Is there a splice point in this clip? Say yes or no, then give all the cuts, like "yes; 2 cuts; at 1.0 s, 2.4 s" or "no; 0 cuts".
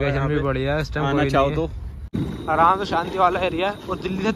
yes; 1 cut; at 2.1 s